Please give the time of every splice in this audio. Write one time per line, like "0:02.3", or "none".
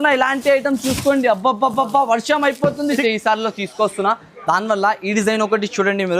0:03.0